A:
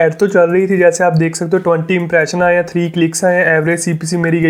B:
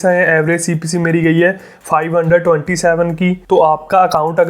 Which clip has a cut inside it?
B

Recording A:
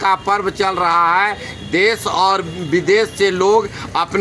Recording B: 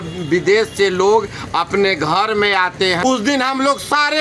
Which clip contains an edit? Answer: B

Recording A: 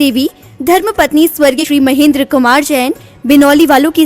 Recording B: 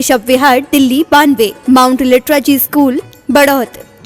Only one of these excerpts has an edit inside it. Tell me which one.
A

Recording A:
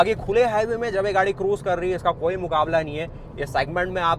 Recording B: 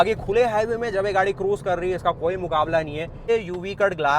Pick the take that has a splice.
B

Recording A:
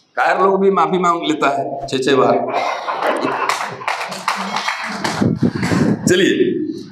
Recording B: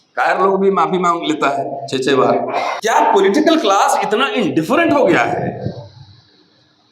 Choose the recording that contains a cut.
B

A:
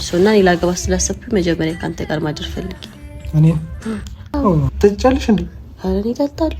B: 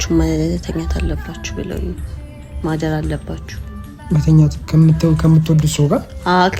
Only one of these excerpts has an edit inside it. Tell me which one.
A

